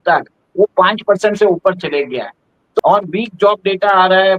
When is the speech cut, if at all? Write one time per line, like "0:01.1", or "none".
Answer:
0:02.8

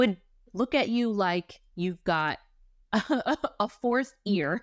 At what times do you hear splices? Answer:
none

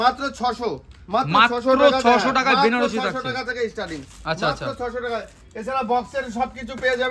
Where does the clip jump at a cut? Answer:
none

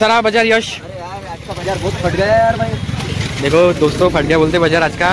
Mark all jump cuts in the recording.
none

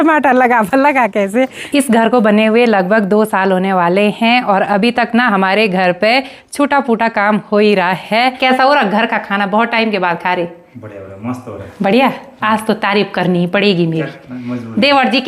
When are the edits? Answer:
0:01.6
0:08.4

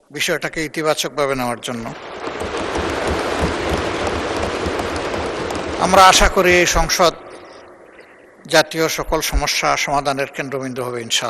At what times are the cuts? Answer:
none

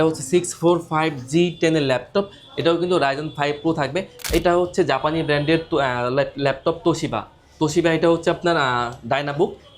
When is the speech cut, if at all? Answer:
0:04.1

